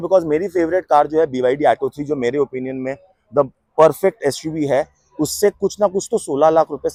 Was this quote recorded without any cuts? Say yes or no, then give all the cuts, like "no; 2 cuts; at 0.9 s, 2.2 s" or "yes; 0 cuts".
yes; 0 cuts